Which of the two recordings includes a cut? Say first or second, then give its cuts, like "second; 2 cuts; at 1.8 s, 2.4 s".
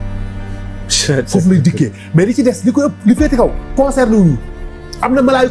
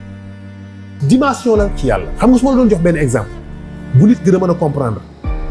second; 1 cut; at 1.0 s